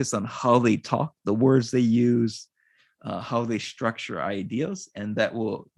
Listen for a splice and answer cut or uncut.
uncut